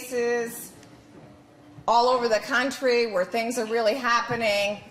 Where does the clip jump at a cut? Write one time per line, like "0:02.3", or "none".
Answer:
none